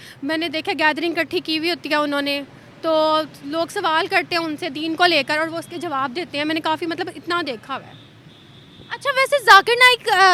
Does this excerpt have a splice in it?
no; 0 cuts

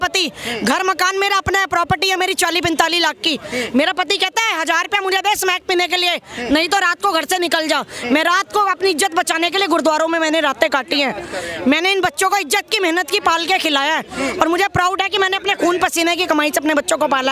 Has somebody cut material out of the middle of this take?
no; 0 cuts

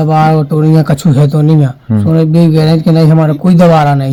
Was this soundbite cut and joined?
no; 0 cuts

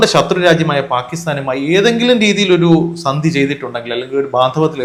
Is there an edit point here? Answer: no; 0 cuts

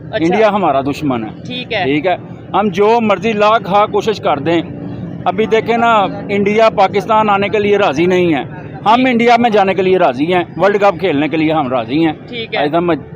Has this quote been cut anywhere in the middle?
no; 0 cuts

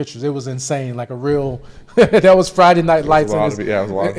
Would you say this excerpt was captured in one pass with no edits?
yes; 0 cuts

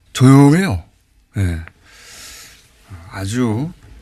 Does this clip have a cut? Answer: no; 0 cuts

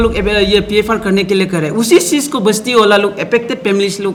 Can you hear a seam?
no; 0 cuts

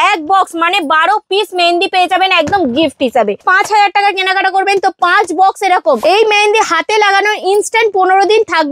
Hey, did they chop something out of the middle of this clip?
yes; 2 cuts; at 3.4 s, 6.0 s

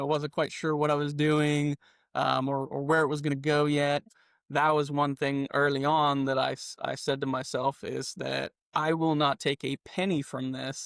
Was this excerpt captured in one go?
no; 1 cut; at 4.1 s

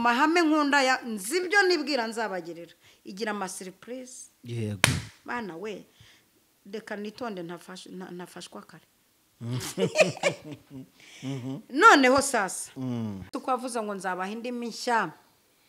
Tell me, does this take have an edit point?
yes; 1 cut; at 13.4 s

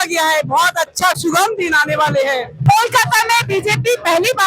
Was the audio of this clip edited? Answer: yes; 1 cut; at 2.5 s

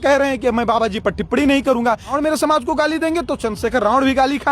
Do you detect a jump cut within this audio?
yes; 1 cut; at 2.2 s

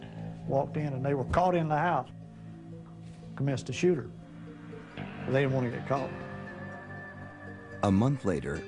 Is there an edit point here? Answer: yes; 1 cut; at 3.7 s

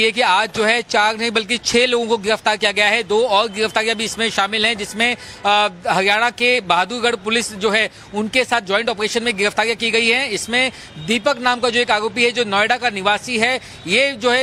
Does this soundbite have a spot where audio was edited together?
no; 0 cuts

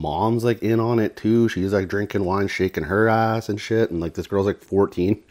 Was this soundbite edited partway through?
no; 0 cuts

